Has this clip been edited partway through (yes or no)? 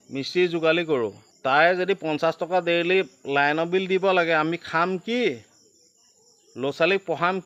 yes